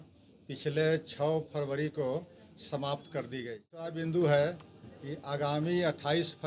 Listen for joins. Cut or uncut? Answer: cut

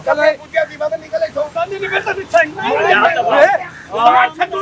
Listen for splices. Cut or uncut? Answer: cut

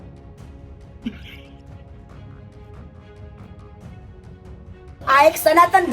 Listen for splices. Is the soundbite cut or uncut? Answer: cut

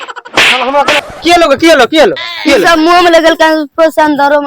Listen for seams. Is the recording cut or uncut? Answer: cut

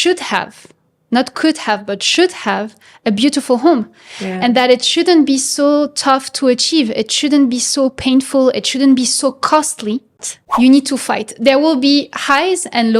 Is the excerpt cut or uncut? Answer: cut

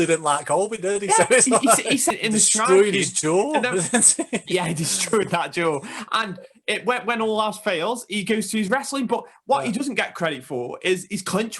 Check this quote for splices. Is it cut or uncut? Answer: cut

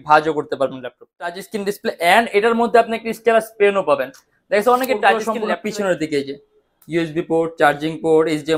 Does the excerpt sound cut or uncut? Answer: cut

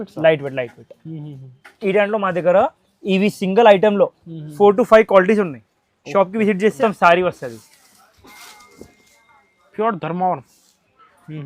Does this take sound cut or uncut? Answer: cut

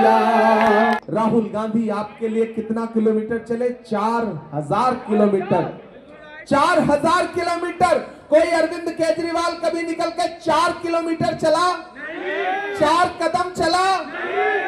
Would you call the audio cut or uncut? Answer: cut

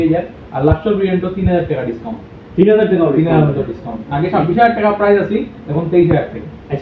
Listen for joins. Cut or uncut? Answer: uncut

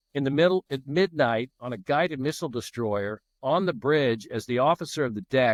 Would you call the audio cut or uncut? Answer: uncut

